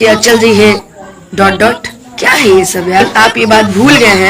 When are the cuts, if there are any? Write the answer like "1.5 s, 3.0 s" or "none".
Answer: 3.1 s